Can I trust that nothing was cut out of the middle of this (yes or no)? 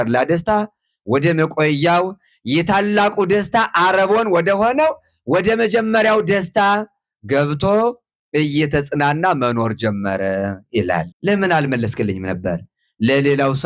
no